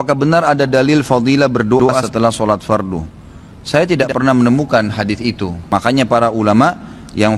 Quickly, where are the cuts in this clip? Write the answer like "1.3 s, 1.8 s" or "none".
5.5 s